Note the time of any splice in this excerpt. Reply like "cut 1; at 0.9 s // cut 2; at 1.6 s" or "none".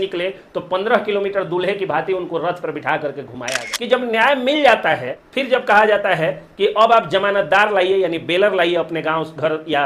cut 1; at 3.7 s